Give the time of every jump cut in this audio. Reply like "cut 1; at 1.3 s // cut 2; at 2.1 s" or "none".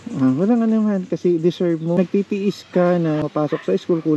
cut 1; at 2.0 s // cut 2; at 3.2 s